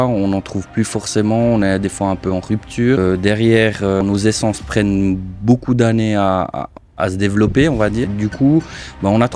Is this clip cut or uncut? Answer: cut